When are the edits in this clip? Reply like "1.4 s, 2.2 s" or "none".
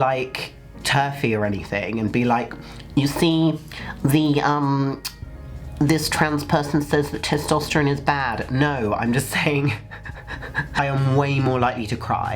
10.8 s